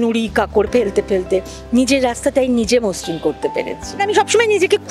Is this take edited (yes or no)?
yes